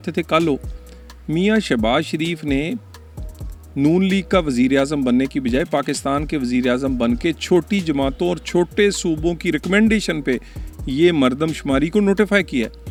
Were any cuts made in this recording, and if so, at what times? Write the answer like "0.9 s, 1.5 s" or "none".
none